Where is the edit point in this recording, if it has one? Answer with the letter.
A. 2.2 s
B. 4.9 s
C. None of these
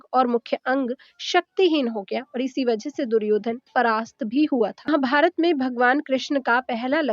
B